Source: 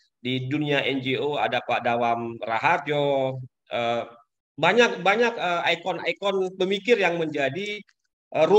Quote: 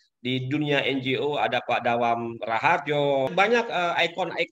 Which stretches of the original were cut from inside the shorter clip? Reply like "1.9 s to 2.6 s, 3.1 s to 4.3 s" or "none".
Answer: 3.3 s to 5.0 s